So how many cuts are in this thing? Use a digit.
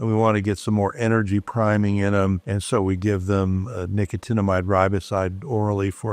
0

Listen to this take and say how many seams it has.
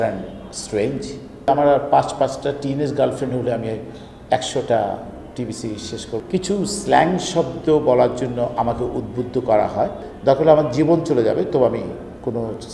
3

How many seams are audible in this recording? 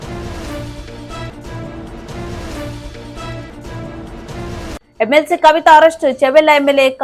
1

